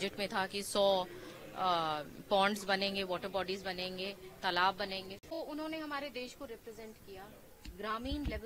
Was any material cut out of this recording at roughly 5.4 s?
yes; 1 cut; at 5.4 s

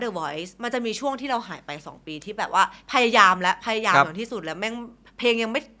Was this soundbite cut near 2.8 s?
no; 0 cuts

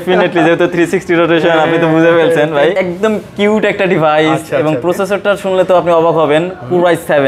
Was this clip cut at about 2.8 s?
yes; 1 cut; at 2.8 s

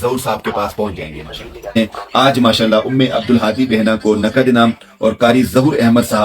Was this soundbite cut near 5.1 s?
no; 1 cut; at 1.7 s

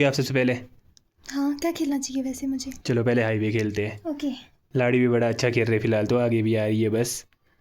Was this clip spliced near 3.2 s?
no; 1 cut; at 4.6 s

